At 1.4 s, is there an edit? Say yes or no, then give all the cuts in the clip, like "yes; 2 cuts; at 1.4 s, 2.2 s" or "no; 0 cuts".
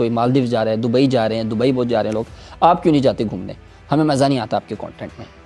no; 0 cuts